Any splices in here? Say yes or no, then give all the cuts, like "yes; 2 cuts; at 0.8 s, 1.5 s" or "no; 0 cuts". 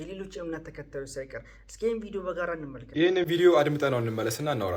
no; 0 cuts